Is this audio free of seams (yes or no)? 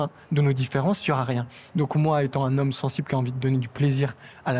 yes